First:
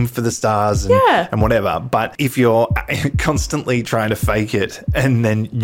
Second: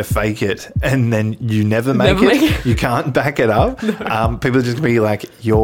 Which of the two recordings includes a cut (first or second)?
first